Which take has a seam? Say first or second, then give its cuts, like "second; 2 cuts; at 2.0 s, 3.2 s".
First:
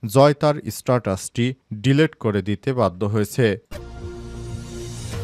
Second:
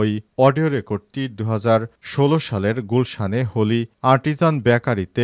first; 1 cut; at 3.7 s